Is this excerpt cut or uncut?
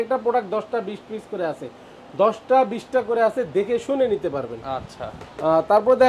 uncut